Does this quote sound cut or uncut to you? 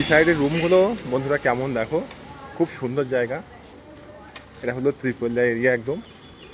uncut